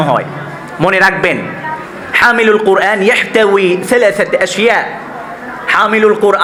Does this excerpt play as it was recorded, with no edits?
yes; 0 cuts

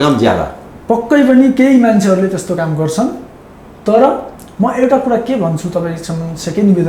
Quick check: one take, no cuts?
yes; 0 cuts

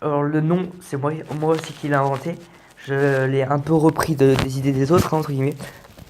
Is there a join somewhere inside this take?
yes; 1 cut; at 3.4 s

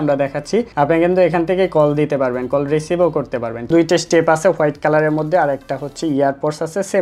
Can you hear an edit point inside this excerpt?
yes; 1 cut; at 3.7 s

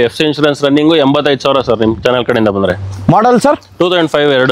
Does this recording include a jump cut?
no; 0 cuts

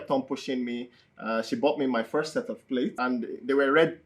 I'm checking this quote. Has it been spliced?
yes; 1 cut; at 3.0 s

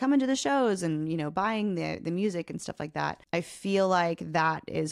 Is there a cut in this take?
yes; 1 cut; at 3.2 s

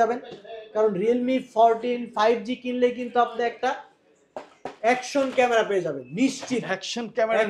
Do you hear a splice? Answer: no; 0 cuts

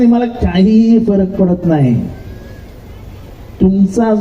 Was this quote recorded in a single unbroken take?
yes; 0 cuts

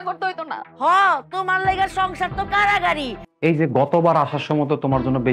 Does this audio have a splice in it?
yes; 1 cut; at 3.2 s

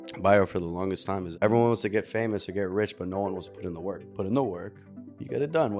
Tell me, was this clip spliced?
yes; 2 cuts; at 1.3 s, 4.1 s

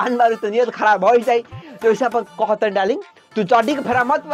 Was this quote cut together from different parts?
no; 0 cuts

